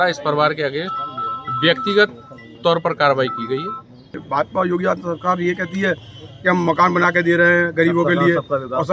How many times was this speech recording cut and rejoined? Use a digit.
1